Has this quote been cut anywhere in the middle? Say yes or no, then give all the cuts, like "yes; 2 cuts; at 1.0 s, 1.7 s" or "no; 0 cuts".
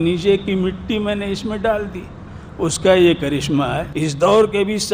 yes; 1 cut; at 3.9 s